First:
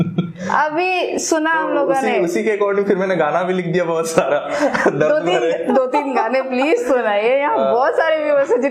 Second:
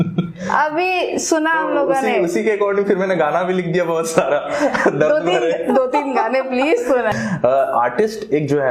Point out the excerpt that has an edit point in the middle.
second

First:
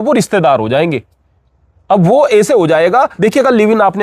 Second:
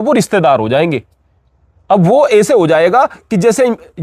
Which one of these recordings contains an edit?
first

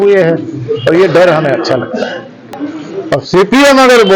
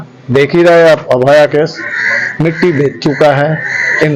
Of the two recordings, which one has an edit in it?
first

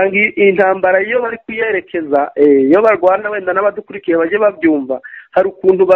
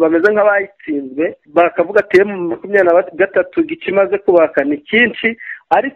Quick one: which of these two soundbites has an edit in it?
second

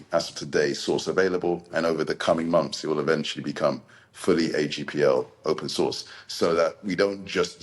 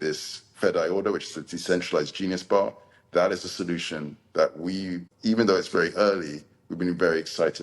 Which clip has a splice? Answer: second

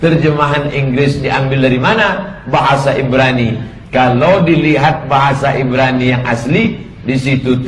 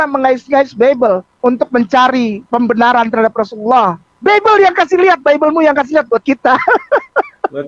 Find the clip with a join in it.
second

